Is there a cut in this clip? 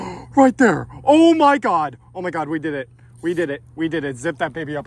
no; 0 cuts

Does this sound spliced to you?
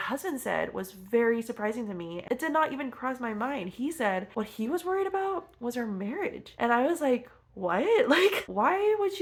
no; 0 cuts

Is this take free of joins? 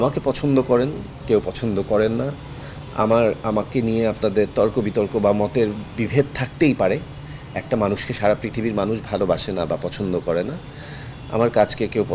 yes; 0 cuts

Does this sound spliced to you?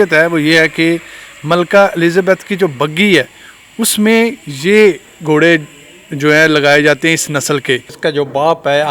yes; 1 cut; at 7.9 s

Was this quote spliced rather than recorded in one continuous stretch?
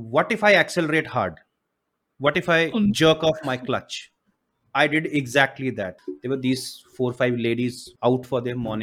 yes; 1 cut; at 6.0 s

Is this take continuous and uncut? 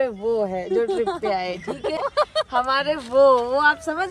no; 1 cut; at 2.0 s

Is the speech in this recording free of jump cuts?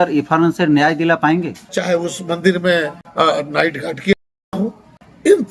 no; 1 cut; at 1.6 s

